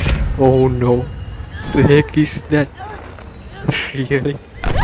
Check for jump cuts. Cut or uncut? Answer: uncut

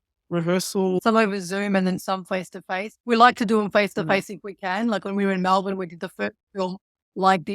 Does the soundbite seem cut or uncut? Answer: cut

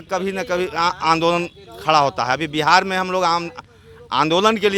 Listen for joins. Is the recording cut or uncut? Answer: uncut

